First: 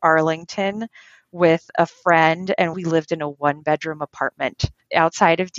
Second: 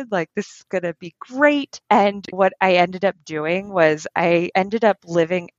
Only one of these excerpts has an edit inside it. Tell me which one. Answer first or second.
first